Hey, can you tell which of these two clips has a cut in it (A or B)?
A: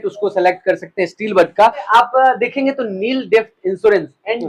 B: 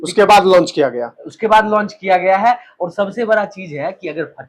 A